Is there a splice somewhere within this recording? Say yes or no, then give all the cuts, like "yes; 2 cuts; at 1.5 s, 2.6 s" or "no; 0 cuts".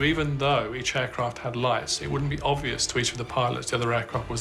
no; 0 cuts